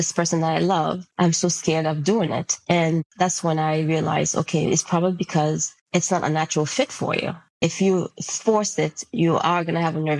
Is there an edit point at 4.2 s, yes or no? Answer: no